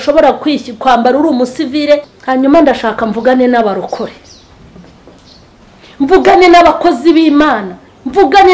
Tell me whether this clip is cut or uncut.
cut